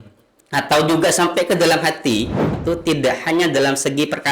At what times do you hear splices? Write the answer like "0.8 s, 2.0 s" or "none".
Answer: 2.5 s